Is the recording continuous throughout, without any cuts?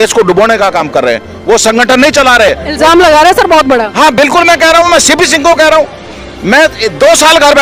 yes; 0 cuts

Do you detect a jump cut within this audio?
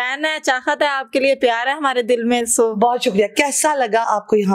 no; 0 cuts

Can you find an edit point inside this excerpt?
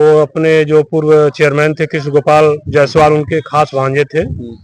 no; 0 cuts

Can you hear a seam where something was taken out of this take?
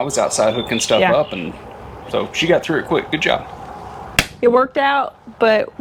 no; 0 cuts

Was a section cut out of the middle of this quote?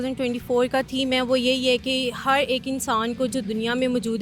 no; 0 cuts

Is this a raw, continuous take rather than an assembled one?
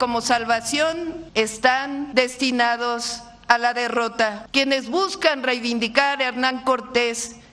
no; 3 cuts; at 1.2 s, 2.1 s, 4.4 s

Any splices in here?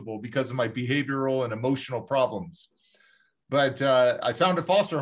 no; 0 cuts

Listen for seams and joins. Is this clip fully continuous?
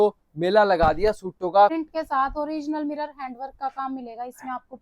no; 1 cut; at 1.7 s

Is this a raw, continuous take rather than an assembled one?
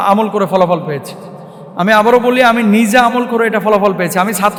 yes; 0 cuts

